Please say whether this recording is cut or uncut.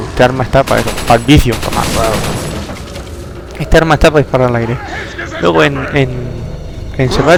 uncut